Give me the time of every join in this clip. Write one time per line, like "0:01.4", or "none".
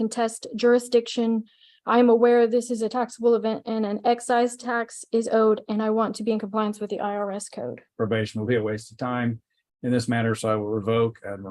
0:07.9